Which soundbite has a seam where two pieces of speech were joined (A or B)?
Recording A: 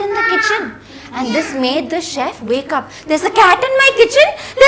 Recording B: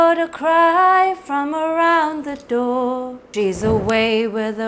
B